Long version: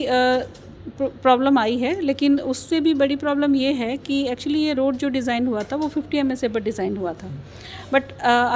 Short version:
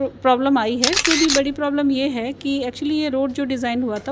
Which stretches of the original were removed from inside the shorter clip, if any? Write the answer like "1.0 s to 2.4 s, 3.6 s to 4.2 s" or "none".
2.0 s to 2.6 s